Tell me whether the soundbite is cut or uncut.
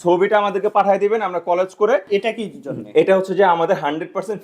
cut